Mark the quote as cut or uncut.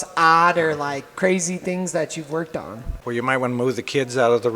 cut